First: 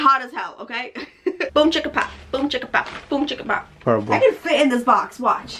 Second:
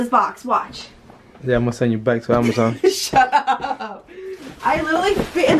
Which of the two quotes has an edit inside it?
first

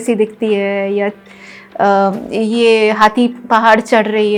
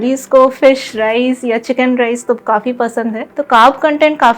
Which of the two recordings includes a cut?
second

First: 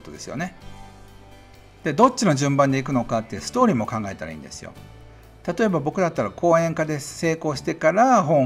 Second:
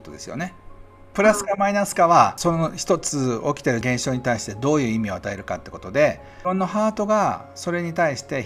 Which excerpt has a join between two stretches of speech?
second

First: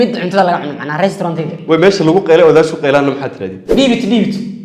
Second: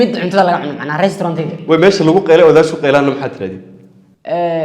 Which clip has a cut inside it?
first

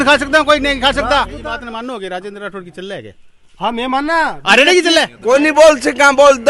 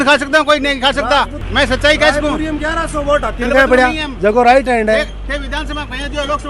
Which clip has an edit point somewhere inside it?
first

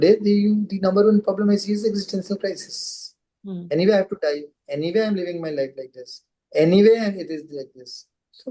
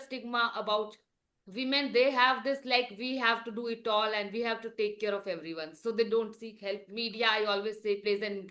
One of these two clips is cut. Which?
second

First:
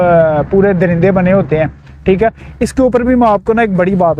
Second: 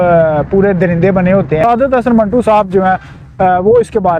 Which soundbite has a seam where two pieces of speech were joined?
second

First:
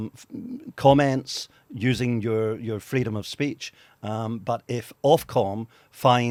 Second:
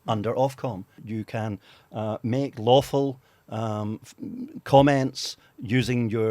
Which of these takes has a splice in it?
second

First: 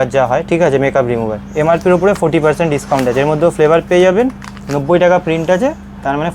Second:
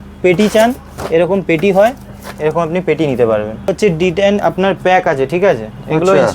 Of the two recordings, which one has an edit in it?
second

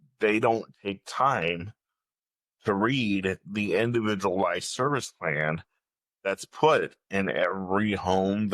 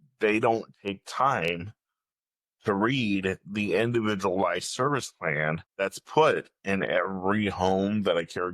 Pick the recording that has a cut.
second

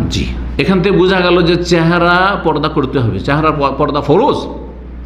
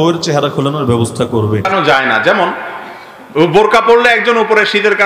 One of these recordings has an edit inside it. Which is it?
second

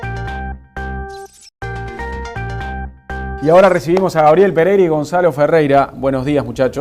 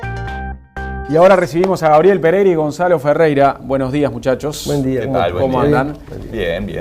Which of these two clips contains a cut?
second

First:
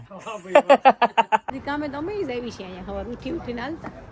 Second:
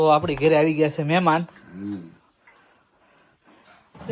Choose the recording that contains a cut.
first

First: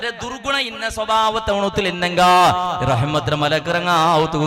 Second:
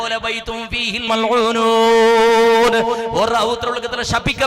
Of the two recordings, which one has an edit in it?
second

